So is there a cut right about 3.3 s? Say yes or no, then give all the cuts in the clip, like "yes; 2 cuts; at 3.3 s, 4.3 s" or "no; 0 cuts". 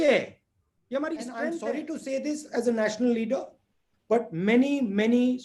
no; 1 cut; at 1.6 s